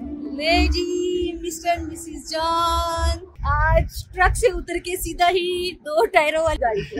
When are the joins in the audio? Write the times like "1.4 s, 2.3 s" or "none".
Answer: 3.3 s